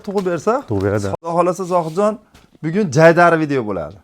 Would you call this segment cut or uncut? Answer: cut